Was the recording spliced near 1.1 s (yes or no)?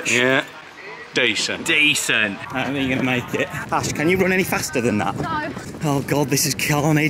no